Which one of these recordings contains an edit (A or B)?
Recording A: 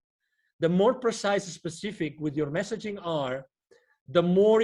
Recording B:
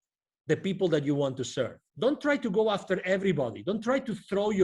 B